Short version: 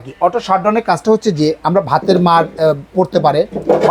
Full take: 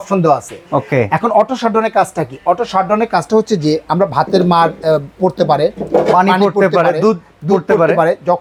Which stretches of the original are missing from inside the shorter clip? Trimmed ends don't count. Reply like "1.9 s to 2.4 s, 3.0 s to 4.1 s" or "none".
none